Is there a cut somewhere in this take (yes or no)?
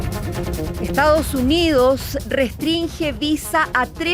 yes